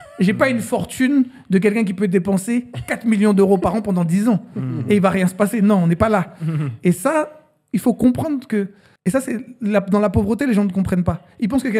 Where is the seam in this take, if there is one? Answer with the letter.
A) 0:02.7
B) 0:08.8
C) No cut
B